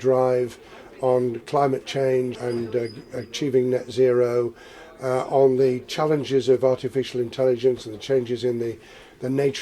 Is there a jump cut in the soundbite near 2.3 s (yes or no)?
yes